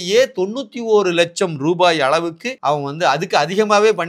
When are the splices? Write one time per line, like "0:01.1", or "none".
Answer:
0:02.5